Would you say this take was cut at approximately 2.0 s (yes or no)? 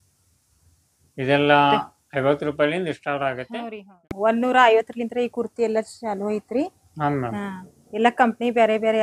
no